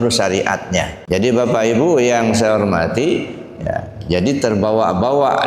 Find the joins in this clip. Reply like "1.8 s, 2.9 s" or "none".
1.0 s